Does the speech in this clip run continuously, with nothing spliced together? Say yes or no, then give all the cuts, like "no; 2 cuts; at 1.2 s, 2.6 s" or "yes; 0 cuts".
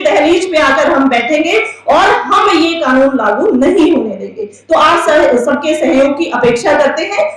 yes; 0 cuts